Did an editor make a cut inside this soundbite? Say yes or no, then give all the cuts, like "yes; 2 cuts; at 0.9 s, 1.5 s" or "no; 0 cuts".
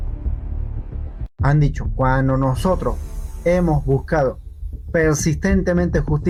no; 0 cuts